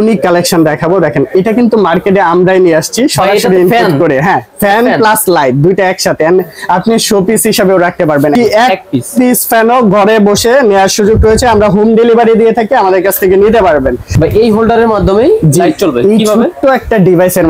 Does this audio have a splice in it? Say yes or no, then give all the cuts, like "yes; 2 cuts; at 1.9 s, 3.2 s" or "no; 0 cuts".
yes; 2 cuts; at 8.3 s, 14.1 s